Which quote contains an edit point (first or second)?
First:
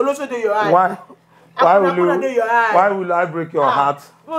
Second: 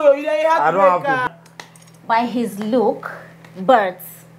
second